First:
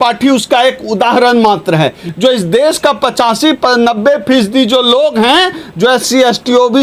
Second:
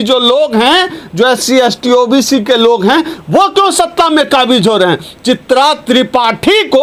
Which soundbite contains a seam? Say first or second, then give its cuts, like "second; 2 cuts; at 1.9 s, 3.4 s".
first; 1 cut; at 2.0 s